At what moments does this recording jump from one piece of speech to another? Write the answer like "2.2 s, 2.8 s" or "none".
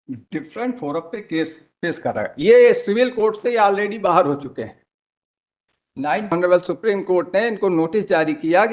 6.3 s